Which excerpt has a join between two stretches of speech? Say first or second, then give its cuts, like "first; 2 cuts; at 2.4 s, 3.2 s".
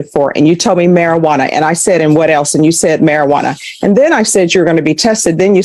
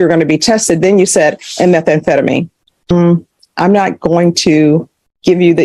second; 1 cut; at 2.7 s